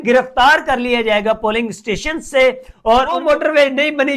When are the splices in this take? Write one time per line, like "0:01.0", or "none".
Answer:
0:03.2

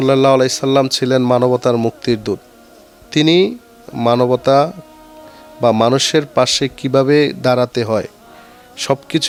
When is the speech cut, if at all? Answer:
none

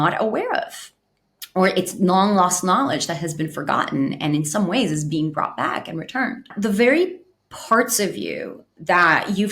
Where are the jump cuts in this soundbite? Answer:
0:06.5

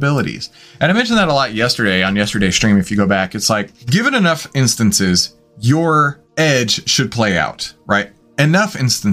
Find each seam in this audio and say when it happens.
0:03.8
0:06.2

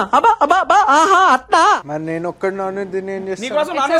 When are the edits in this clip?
none

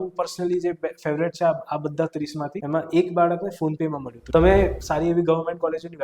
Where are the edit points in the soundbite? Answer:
0:02.6
0:04.1

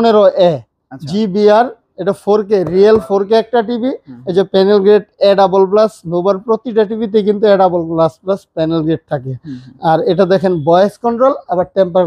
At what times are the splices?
none

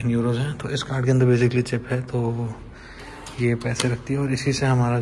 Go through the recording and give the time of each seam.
none

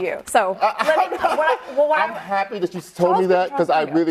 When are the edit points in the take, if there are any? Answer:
none

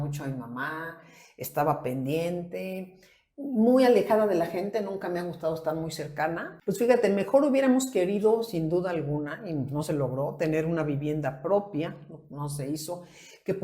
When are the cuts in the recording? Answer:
0:06.5

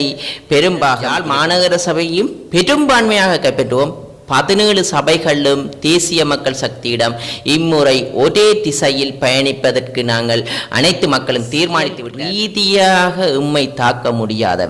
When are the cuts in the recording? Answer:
0:01.1
0:12.0

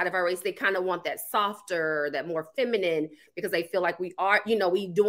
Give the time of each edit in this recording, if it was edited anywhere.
none

